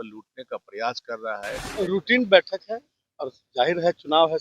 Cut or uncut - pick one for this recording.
cut